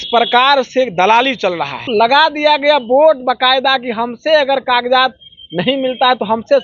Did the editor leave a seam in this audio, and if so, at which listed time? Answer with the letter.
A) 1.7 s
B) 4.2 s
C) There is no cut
A